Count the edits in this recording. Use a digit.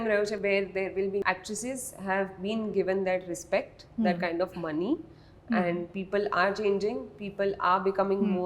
1